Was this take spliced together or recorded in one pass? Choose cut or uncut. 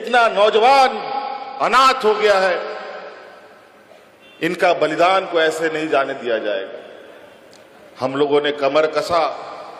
uncut